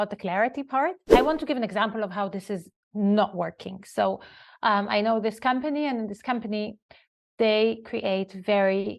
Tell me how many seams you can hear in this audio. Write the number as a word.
one